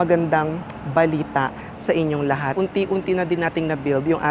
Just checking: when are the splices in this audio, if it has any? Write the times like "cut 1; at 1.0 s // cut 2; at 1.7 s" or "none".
cut 1; at 2.5 s